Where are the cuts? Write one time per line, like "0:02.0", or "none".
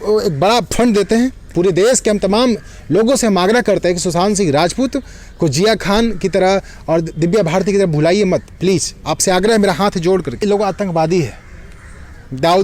0:01.4
0:10.4

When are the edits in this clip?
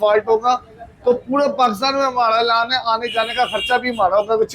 none

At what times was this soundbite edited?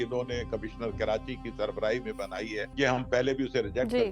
0:02.7

